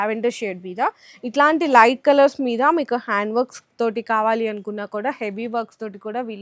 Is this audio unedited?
yes; 0 cuts

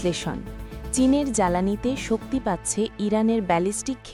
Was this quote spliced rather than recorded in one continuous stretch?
no; 0 cuts

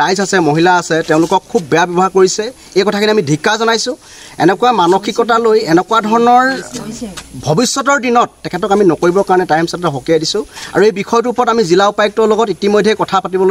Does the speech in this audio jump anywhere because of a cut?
no; 0 cuts

